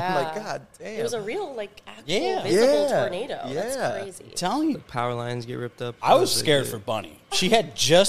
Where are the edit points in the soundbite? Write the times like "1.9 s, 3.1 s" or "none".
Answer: 4.8 s